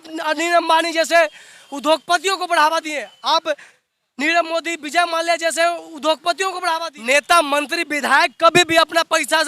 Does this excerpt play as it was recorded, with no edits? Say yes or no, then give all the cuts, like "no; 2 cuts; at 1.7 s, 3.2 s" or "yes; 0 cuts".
no; 1 cut; at 6.9 s